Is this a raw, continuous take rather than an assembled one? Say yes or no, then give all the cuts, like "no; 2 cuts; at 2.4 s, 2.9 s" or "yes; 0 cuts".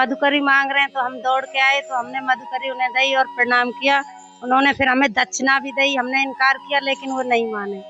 yes; 0 cuts